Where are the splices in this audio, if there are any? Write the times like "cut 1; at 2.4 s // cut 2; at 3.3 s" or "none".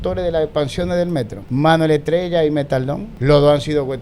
cut 1; at 1.4 s // cut 2; at 3.1 s